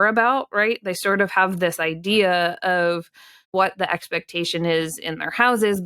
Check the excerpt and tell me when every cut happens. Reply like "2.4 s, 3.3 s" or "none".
3.5 s